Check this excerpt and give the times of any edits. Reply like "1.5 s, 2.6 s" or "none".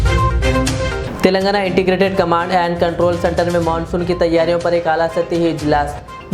1.0 s